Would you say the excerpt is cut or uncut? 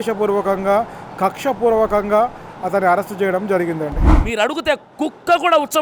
cut